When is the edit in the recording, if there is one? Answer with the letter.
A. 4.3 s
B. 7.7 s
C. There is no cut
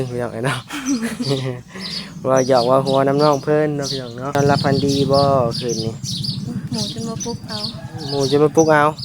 A